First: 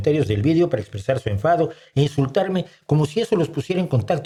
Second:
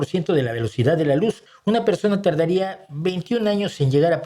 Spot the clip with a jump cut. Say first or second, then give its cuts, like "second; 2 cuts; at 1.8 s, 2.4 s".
second; 1 cut; at 1.4 s